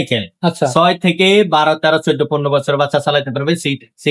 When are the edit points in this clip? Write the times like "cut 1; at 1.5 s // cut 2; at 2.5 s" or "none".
none